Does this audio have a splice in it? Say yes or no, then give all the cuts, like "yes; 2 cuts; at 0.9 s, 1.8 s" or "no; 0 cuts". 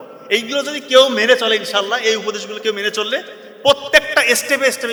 no; 0 cuts